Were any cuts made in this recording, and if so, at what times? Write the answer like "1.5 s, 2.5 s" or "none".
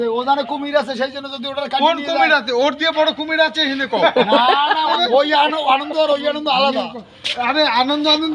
4.9 s